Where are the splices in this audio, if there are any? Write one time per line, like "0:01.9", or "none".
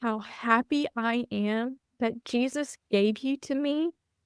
none